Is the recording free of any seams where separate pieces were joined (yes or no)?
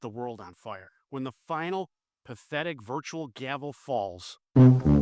no